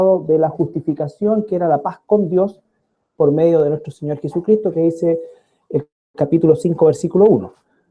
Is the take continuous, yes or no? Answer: no